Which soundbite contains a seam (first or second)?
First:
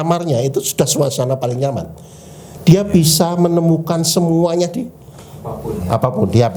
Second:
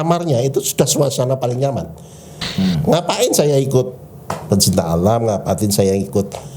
second